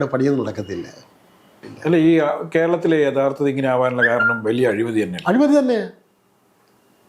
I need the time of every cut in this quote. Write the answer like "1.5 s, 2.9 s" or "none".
1.7 s